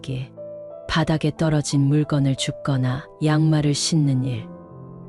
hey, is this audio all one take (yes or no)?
yes